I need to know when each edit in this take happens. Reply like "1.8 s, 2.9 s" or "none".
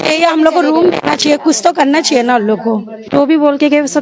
3.1 s

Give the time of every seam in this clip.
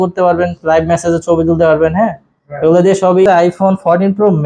3.3 s

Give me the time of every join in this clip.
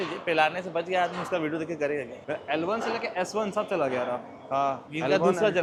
none

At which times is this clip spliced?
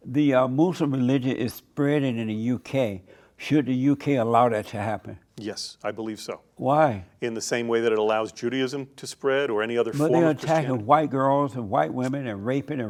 none

